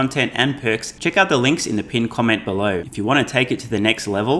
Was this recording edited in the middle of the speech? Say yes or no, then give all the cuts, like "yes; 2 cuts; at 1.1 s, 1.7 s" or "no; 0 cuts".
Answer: yes; 2 cuts; at 0.9 s, 2.9 s